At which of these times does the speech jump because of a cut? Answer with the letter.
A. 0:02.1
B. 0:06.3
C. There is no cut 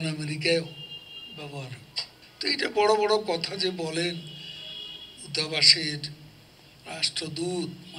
A